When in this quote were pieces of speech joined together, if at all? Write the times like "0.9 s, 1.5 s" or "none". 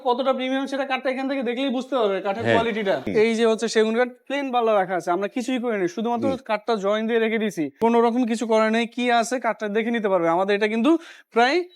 3.1 s, 7.8 s